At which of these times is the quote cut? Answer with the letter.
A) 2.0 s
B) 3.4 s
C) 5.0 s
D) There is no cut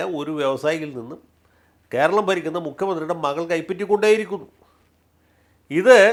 D